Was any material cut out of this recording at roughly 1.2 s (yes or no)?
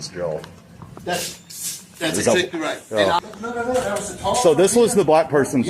no